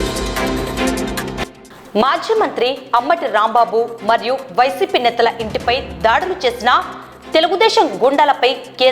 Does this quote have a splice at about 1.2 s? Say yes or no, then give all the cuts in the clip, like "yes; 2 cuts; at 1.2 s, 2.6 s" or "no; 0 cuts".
yes; 1 cut; at 1.2 s